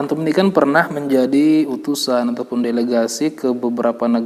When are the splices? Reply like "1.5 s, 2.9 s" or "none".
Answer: none